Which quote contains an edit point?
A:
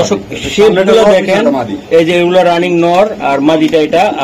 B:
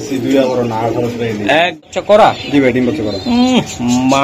B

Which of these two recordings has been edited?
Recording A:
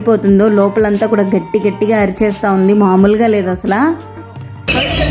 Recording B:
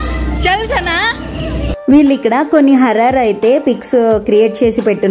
B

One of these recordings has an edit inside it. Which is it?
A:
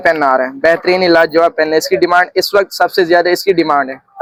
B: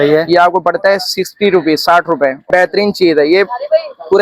B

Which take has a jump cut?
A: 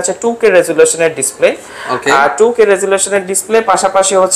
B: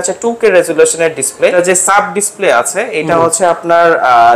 B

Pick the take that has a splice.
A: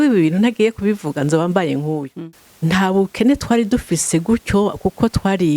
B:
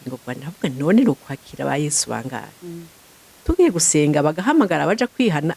A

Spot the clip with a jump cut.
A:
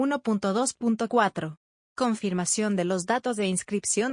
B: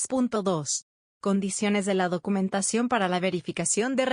A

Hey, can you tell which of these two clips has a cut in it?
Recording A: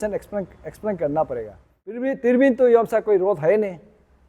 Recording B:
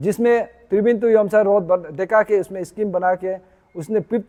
A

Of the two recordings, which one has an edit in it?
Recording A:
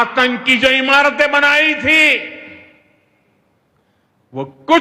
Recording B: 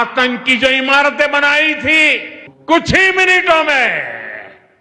B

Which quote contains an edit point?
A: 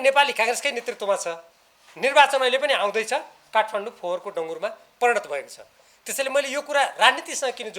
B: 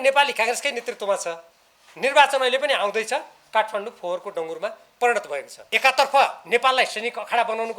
B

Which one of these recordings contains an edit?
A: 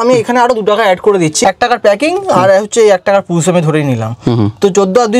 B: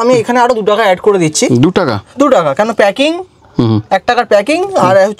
A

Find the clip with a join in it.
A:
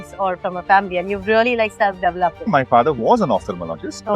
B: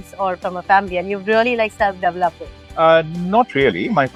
A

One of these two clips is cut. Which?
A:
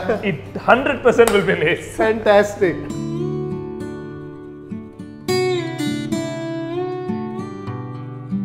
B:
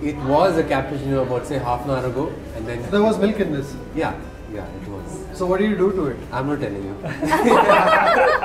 B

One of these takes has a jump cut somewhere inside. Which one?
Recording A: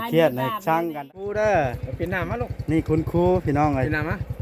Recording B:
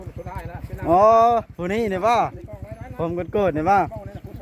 A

